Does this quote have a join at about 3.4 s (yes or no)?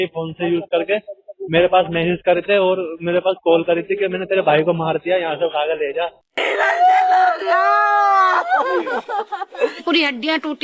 no